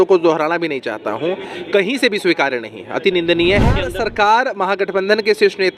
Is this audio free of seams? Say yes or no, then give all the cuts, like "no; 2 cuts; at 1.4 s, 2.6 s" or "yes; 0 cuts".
no; 1 cut; at 3.8 s